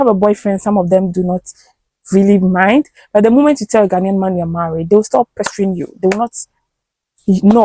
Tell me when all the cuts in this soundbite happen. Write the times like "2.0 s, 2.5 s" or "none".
none